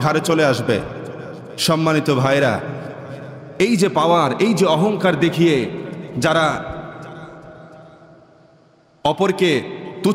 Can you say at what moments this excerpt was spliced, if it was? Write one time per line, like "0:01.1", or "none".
none